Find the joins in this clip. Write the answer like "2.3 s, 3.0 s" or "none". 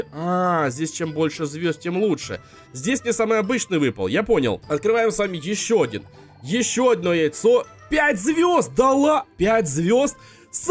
4.6 s, 9.3 s

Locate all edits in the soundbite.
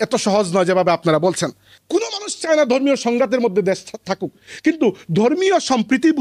1.7 s

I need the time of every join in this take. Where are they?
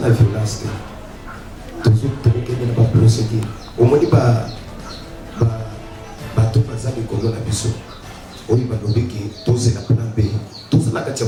none

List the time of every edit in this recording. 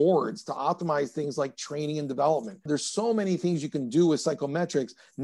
none

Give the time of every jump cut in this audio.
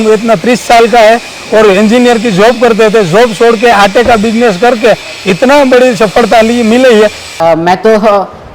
7.3 s

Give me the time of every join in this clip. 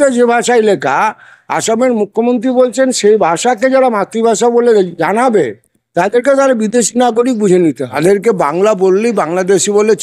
7.9 s

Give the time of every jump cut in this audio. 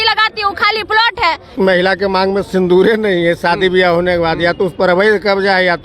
1.5 s

